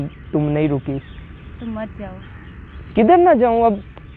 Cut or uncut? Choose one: uncut